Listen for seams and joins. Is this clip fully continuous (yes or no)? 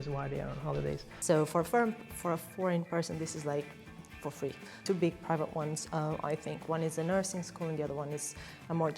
no